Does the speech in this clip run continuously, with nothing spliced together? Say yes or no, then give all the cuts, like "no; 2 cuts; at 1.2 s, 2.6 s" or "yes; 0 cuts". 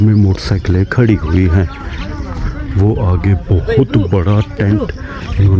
yes; 0 cuts